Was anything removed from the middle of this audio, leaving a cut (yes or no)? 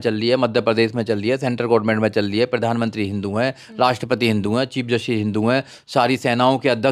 no